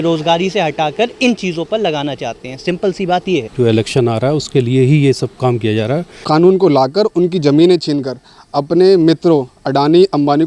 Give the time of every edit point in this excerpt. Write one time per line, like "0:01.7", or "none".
0:03.5
0:06.1